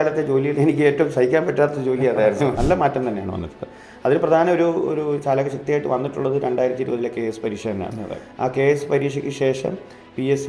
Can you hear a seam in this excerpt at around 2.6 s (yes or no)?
yes